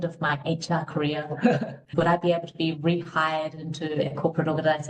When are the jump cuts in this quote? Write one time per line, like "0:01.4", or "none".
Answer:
0:01.9